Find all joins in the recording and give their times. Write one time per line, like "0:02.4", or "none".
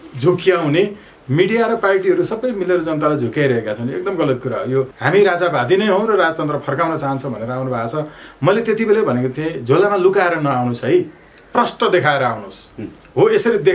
0:04.9

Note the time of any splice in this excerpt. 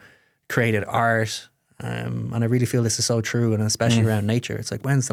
none

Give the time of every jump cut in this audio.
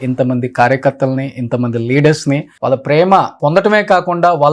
0:02.5
0:03.3

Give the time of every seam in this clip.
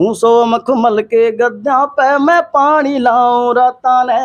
none

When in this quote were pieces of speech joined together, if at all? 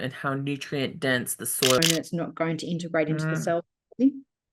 0:01.8

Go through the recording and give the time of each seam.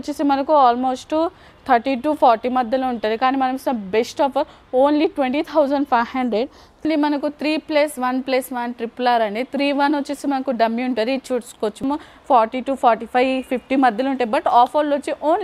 0:06.8
0:11.8

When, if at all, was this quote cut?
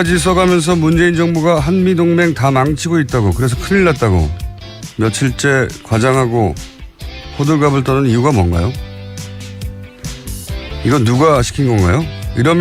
0:09.2

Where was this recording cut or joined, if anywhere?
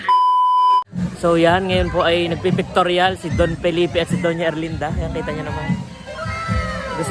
0:00.9

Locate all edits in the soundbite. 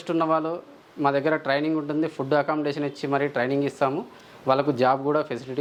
none

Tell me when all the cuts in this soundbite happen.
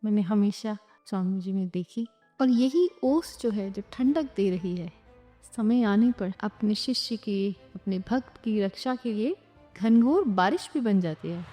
0:00.9
0:02.2
0:06.4

